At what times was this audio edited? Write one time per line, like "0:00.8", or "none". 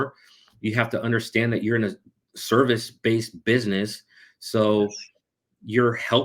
none